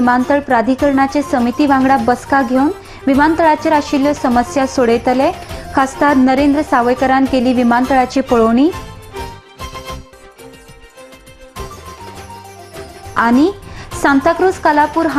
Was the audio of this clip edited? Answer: no; 0 cuts

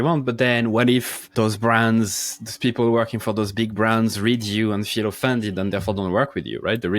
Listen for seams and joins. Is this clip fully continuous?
no; 1 cut; at 1.2 s

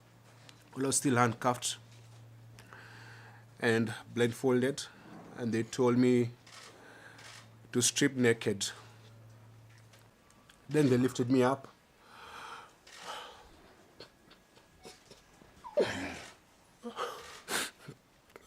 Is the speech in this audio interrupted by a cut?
yes; 1 cut; at 10.1 s

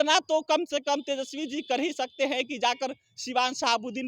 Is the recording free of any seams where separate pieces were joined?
yes; 0 cuts

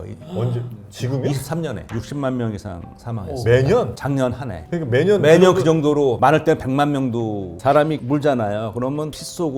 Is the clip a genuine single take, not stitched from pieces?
no; 2 cuts; at 1.8 s, 7.6 s

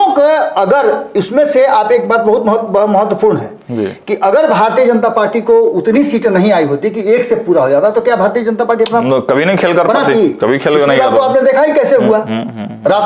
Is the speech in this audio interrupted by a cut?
no; 0 cuts

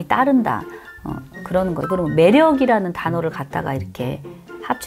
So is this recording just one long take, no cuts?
no; 1 cut; at 1.8 s

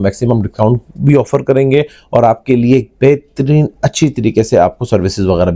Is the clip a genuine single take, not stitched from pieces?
yes; 0 cuts

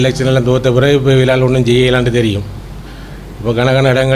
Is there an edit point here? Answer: no; 0 cuts

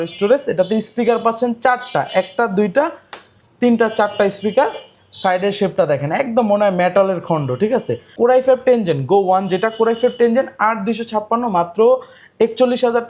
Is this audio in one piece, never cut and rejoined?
no; 1 cut; at 8.0 s

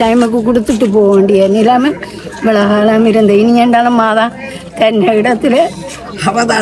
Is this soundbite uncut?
yes; 0 cuts

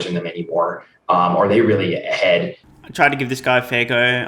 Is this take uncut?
yes; 0 cuts

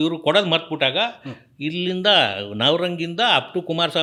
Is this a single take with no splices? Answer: yes; 0 cuts

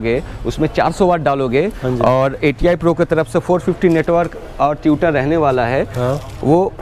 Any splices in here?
no; 0 cuts

